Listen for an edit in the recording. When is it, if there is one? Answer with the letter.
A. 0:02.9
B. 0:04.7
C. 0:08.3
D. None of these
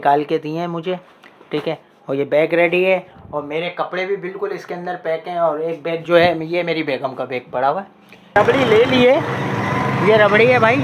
C